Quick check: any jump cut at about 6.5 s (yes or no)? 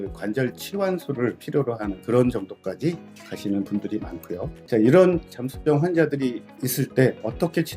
no